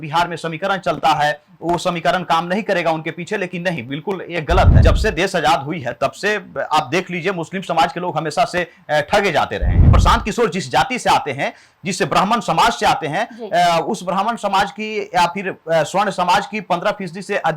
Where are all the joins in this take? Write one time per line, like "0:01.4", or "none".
0:04.7
0:09.9